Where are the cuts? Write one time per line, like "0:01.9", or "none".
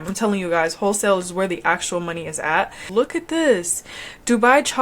0:02.8